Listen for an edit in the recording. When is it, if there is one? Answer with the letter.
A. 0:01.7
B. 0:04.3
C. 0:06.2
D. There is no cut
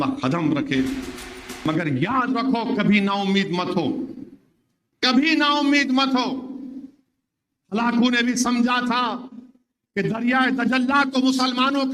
A